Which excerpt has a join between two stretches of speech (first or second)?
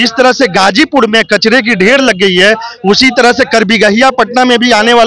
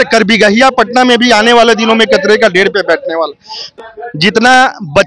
second